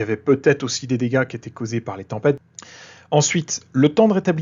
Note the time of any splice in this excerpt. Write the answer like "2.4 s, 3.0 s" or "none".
2.4 s

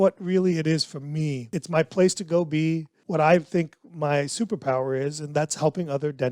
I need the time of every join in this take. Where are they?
1.5 s, 2.9 s

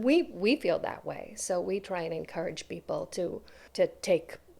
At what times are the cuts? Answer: 3.6 s

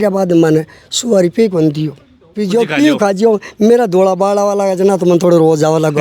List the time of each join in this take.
2.4 s

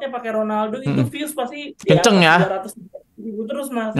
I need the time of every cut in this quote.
none

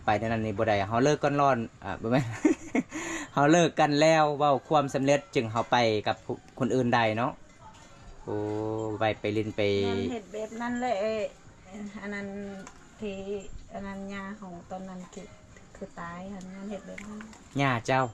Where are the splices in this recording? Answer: none

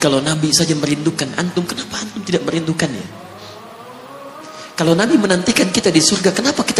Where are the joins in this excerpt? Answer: 3.1 s, 4.7 s

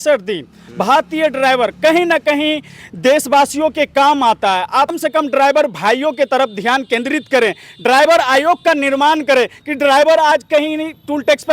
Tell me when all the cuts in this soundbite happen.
4.9 s

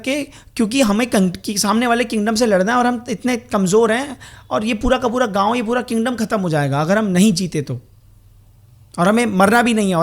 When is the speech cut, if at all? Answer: none

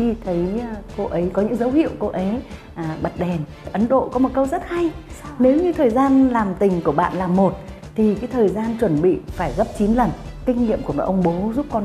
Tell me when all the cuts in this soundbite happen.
3.7 s, 10.3 s

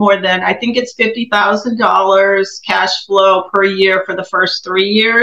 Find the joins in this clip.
none

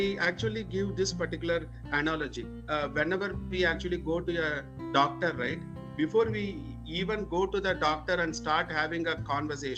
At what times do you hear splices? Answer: none

